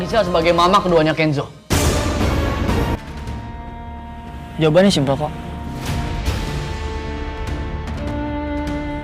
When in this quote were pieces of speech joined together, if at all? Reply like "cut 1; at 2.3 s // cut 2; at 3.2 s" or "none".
cut 1; at 3.0 s